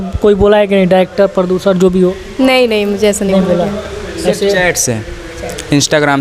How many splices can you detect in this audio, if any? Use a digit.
0